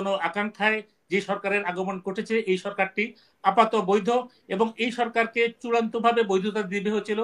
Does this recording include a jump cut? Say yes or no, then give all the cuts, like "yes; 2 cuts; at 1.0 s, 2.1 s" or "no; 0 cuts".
no; 0 cuts